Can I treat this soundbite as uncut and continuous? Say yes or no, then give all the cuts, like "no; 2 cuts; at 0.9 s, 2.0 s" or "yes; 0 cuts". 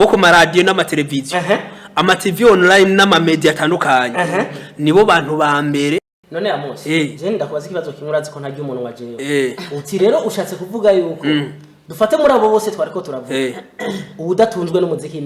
no; 1 cut; at 6.2 s